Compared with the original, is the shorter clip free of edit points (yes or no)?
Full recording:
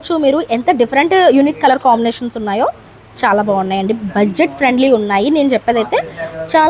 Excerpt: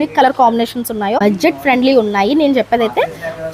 no